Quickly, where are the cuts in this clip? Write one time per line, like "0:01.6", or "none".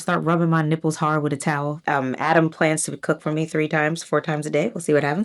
0:01.8